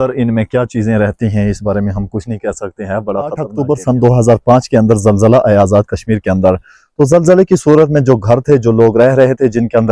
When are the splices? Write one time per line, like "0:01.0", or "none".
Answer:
0:03.5